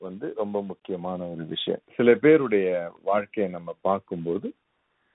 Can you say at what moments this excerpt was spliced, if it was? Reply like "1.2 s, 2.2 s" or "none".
1.9 s